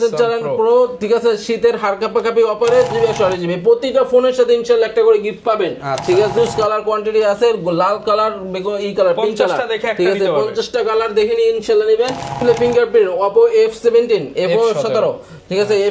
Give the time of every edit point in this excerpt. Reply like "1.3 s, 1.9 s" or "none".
2.9 s, 6.4 s, 12.3 s